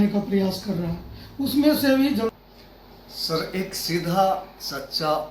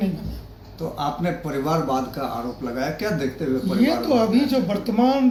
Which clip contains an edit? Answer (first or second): first